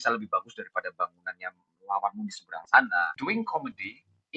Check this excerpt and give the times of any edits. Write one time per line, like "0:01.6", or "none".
0:03.1